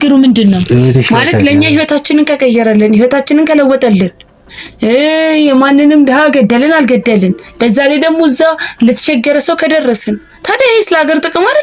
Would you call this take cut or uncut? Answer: uncut